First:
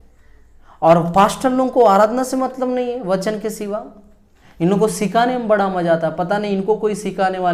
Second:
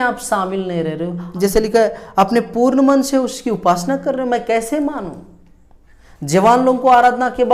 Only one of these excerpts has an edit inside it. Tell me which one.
second; 1 cut; at 1.3 s

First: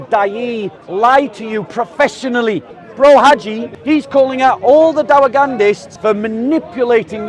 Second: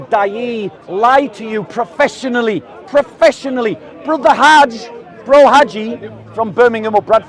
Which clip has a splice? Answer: first; 3 cuts; at 2.7 s, 3.7 s, 5.9 s

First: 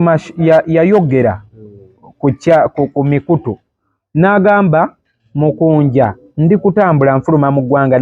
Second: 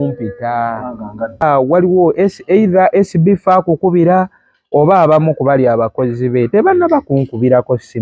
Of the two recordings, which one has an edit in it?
second; 1 cut; at 1.4 s

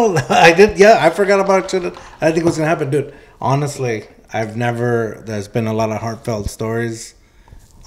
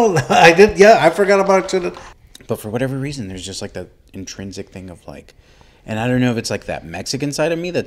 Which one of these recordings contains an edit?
second; 1 cut; at 2.0 s

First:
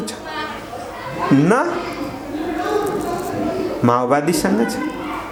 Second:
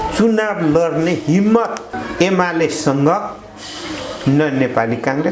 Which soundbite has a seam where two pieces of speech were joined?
second; 1 cut; at 2.0 s

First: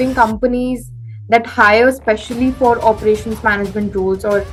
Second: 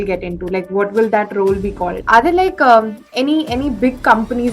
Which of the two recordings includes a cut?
second; 1 cut; at 2.0 s

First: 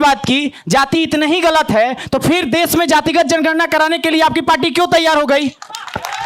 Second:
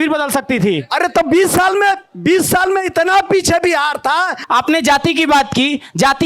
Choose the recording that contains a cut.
second; 1 cut; at 4.4 s

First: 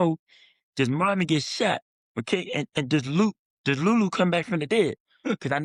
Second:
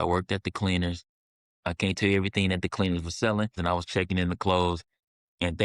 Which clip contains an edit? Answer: second; 1 cut; at 3.6 s

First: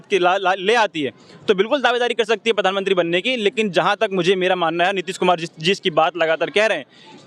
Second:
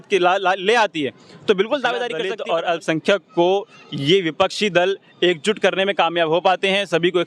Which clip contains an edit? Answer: second; 1 cut; at 2.2 s

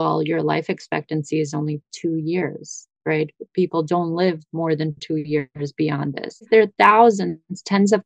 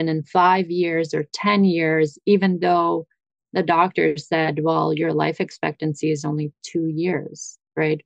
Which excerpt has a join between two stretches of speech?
first; 1 cut; at 6.4 s

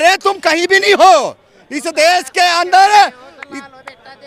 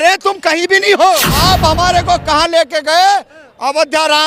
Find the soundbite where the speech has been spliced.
second; 1 cut; at 1.3 s

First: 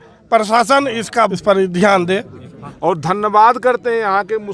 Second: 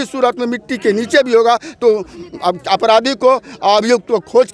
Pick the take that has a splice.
first; 2 cuts; at 1.4 s, 2.6 s

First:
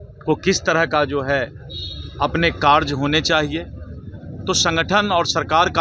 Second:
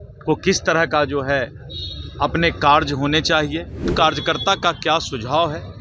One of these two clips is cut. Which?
second; 1 cut; at 3.9 s

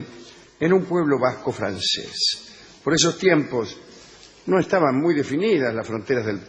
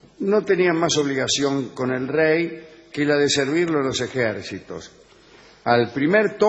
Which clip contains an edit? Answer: first; 1 cut; at 2.8 s

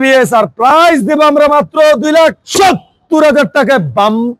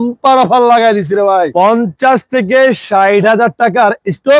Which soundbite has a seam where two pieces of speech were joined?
second; 1 cut; at 1.5 s

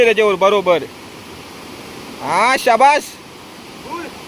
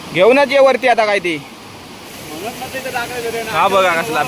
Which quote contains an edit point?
second; 1 cut; at 2.0 s

